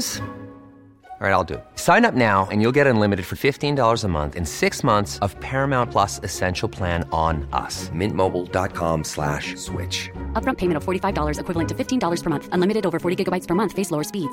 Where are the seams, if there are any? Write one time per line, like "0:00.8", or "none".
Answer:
none